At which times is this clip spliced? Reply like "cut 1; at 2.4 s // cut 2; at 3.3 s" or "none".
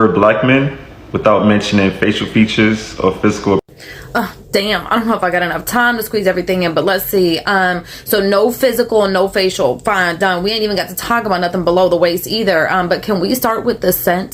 none